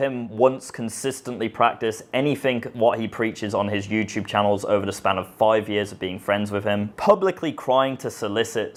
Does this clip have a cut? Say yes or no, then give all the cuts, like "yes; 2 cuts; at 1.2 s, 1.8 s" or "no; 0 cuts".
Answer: no; 0 cuts